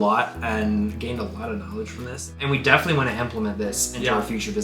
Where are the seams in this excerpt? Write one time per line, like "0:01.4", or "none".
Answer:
0:02.4